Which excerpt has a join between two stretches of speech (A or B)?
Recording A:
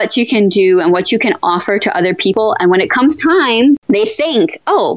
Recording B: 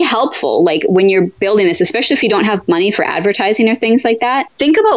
A